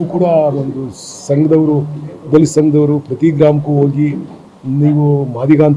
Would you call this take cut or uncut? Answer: uncut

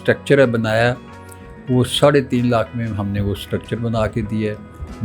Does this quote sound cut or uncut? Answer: uncut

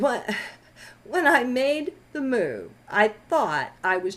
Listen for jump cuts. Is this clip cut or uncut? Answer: cut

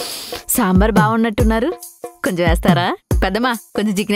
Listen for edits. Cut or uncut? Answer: uncut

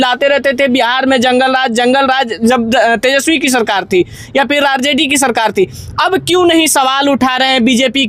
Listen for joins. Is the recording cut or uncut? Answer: uncut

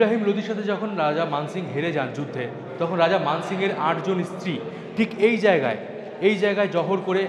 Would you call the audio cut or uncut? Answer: uncut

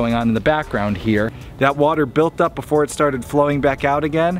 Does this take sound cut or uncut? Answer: cut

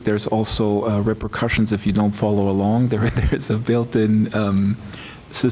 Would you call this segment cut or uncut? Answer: uncut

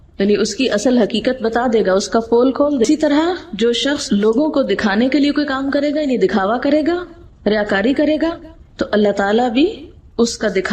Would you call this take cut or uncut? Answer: cut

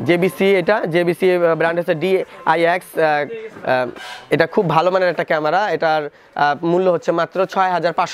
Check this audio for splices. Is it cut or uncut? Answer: uncut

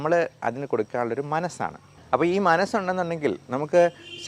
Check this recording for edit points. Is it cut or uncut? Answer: uncut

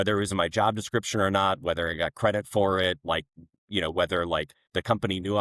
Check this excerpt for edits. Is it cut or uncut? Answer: uncut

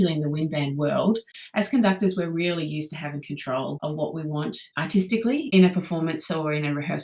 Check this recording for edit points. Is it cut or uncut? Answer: cut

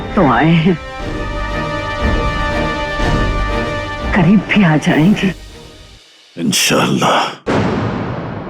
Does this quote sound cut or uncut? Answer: cut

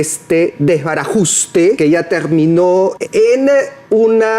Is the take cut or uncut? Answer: cut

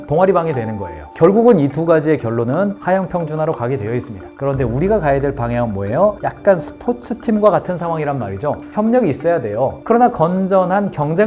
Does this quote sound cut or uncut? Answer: cut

